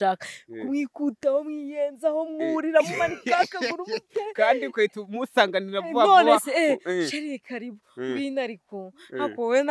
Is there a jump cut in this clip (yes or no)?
no